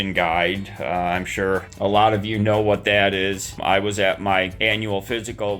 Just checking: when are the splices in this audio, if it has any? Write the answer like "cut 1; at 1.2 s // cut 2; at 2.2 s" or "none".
cut 1; at 1.7 s // cut 2; at 3.6 s // cut 3; at 4.5 s